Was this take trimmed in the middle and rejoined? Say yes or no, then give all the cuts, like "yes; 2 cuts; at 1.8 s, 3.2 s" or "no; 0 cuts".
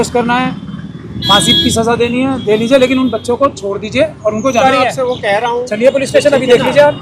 yes; 1 cut; at 4.6 s